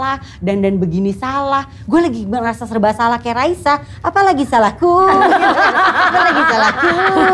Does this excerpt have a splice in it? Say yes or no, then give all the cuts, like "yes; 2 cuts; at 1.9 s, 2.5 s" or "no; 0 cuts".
no; 0 cuts